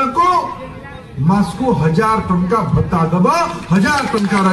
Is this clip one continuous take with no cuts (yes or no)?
yes